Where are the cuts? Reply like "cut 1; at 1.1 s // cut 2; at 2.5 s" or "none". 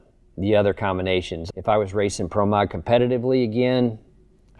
cut 1; at 1.4 s

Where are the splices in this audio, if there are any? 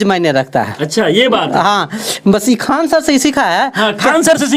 none

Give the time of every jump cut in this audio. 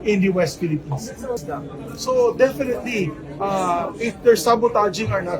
cut 1; at 1.4 s

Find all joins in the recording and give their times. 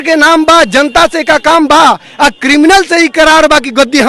none

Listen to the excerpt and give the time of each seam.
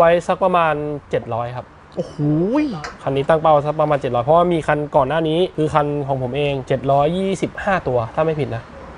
none

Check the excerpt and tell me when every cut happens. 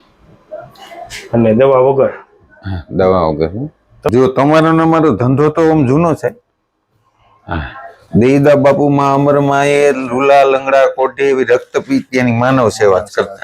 cut 1; at 4.1 s

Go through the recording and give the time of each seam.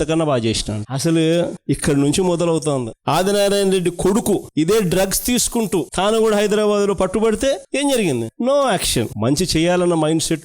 cut 1; at 2.9 s // cut 2; at 9.1 s

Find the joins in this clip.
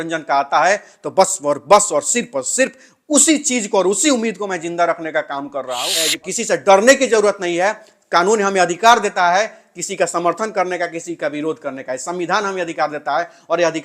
cut 1; at 6.0 s

